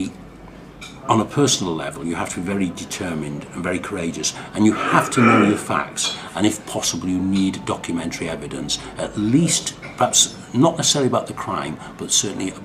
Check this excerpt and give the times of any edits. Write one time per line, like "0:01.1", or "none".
0:08.7